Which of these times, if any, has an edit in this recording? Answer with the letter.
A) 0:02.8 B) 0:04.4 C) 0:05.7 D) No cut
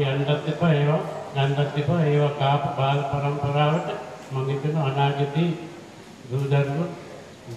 D